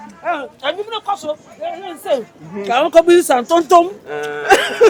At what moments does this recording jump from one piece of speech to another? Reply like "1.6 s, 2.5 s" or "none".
none